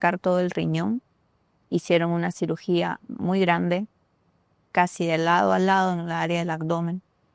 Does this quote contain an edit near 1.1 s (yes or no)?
no